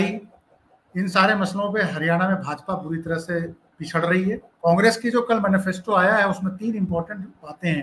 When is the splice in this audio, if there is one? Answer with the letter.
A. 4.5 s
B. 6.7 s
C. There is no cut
A